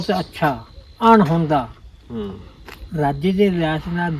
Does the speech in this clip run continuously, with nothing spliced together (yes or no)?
yes